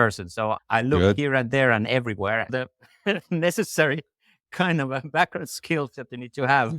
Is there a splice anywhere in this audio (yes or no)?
yes